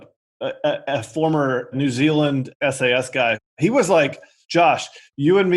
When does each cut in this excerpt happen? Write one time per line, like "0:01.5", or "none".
0:01.7
0:02.5
0:03.5